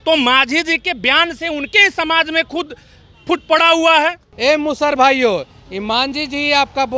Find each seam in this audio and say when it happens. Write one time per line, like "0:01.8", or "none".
0:04.3